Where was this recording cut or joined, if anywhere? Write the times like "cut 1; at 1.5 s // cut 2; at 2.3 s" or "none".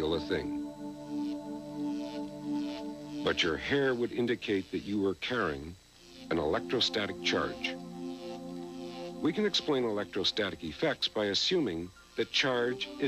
cut 1; at 8.9 s